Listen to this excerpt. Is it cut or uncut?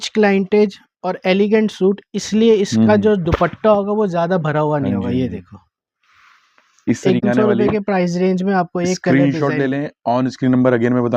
cut